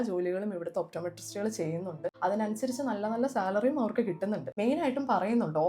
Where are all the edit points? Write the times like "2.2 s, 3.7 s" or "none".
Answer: 2.2 s, 4.5 s